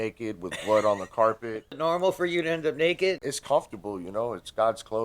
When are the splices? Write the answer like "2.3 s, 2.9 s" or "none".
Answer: 1.8 s, 3.2 s